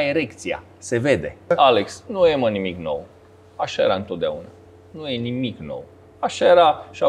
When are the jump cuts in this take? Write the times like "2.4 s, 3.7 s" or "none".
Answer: 1.5 s